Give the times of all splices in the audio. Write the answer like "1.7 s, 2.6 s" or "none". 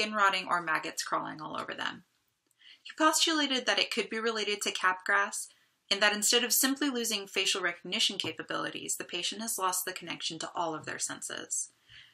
none